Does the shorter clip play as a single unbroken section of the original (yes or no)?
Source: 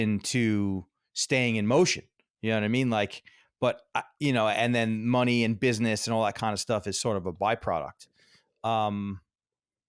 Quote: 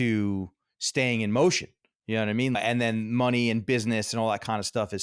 no